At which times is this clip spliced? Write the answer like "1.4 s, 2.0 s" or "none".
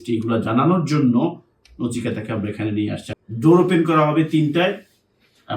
3.0 s